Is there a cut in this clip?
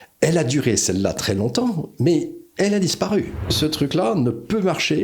yes; 1 cut; at 3.5 s

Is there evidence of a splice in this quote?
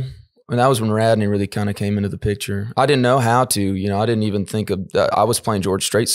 no; 0 cuts

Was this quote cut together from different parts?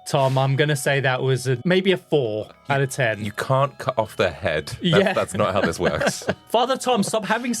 yes; 2 cuts; at 1.6 s, 2.6 s

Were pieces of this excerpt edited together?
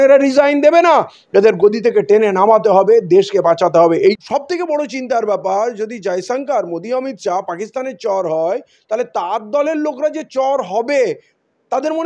yes; 1 cut; at 4.2 s

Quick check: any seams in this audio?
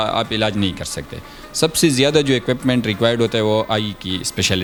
no; 0 cuts

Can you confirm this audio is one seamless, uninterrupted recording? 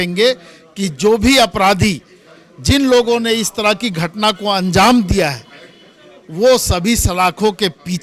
yes; 0 cuts

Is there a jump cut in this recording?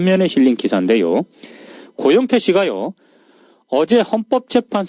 no; 0 cuts

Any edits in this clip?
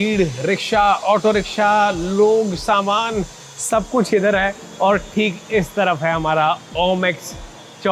no; 0 cuts

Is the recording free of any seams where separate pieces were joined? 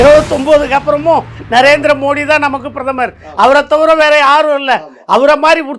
yes; 0 cuts

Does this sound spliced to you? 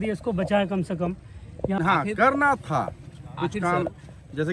yes; 1 cut; at 1.8 s

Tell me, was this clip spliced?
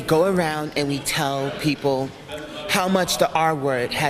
no; 0 cuts

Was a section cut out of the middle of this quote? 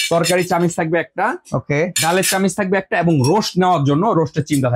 no; 0 cuts

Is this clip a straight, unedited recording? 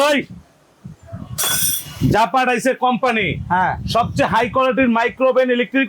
yes; 0 cuts

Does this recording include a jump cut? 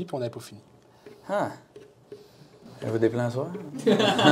no; 0 cuts

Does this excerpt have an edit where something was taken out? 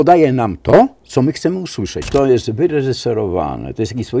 yes; 1 cut; at 2.1 s

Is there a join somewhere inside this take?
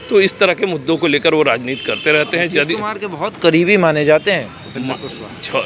no; 0 cuts

